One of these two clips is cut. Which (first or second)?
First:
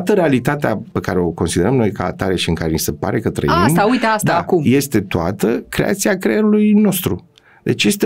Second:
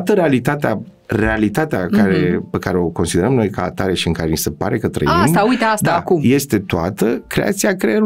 first